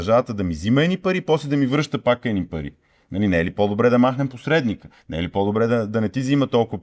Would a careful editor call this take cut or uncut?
uncut